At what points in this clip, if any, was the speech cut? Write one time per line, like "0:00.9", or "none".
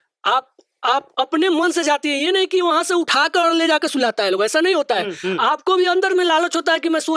none